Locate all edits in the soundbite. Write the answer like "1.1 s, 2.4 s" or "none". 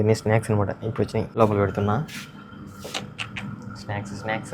1.3 s